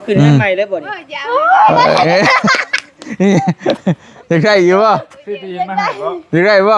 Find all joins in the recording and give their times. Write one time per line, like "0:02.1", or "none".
none